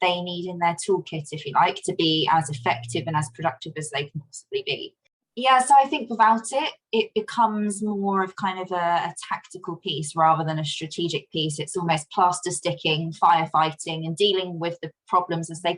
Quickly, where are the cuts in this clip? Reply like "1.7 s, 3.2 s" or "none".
5.1 s